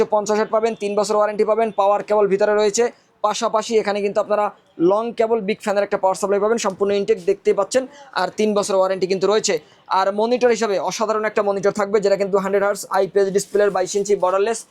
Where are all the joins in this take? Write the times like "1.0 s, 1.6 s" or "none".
none